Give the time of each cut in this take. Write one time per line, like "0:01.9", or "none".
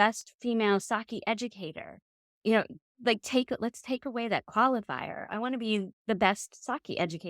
none